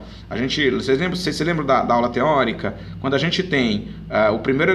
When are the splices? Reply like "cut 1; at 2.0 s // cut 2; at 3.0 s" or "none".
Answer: cut 1; at 1.1 s